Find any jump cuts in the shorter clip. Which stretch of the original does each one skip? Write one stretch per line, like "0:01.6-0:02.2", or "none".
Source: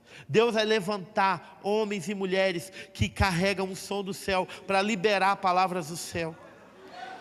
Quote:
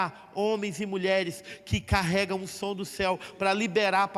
none